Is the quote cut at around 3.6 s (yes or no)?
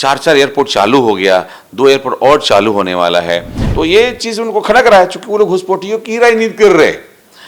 yes